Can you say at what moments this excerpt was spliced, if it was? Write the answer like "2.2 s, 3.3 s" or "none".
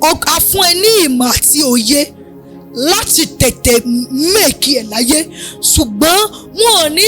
none